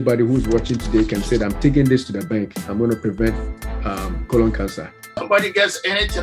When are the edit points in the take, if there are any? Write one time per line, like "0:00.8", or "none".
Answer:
0:05.1